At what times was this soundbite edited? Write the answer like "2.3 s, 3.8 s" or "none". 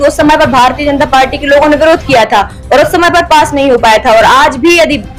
none